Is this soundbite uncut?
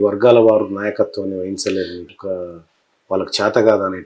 no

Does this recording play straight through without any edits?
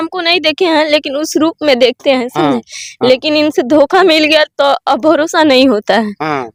yes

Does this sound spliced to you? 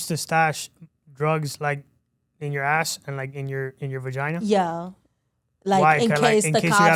no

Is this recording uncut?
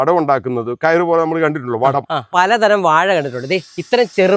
no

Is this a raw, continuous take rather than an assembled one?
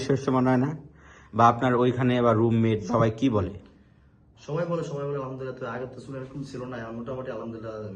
no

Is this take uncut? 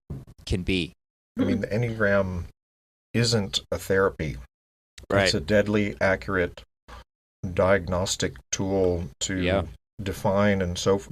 no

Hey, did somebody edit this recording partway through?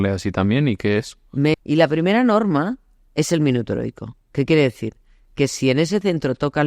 yes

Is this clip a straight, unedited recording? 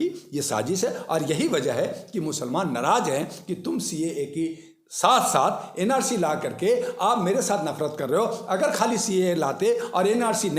yes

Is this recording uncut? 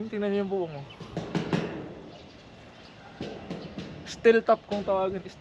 yes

